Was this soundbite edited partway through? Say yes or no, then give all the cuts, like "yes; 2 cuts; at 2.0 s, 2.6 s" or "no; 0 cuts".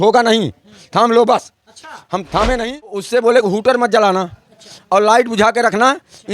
yes; 1 cut; at 3.1 s